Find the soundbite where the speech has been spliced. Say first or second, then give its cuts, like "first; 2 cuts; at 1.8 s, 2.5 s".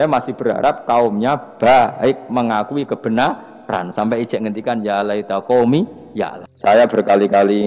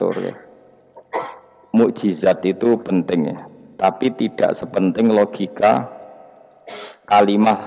first; 1 cut; at 6.4 s